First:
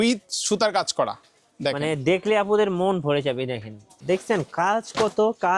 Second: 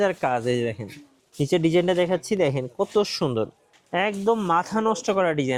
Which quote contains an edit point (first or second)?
first